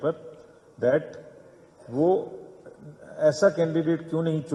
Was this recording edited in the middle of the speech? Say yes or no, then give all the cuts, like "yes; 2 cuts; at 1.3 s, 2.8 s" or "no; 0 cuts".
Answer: no; 0 cuts